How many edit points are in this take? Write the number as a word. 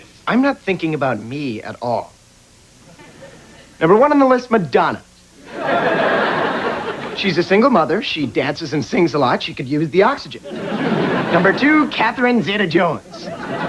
zero